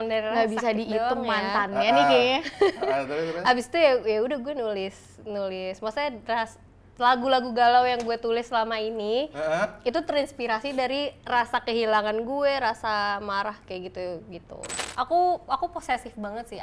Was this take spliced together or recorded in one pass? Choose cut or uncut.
cut